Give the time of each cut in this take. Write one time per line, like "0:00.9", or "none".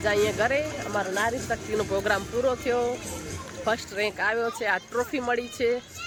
none